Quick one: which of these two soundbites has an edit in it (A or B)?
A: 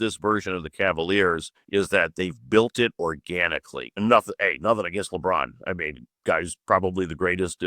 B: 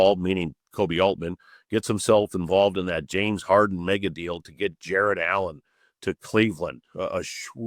A